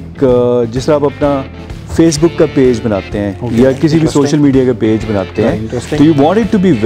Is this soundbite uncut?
yes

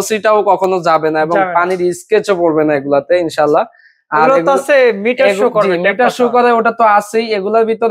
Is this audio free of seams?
yes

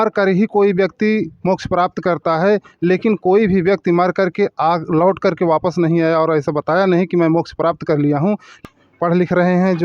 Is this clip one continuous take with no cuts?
no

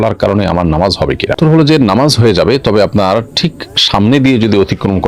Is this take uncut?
yes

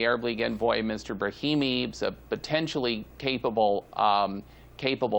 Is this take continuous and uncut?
yes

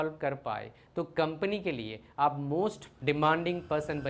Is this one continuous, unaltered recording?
yes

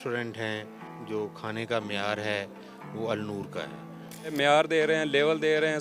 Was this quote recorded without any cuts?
no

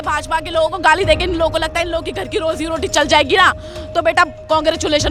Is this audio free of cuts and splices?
yes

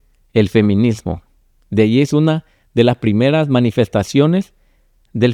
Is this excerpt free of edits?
yes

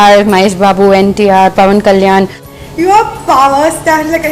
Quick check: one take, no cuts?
no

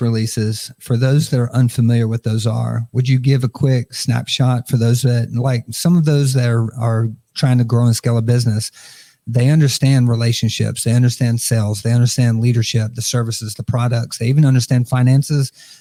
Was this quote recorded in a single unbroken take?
yes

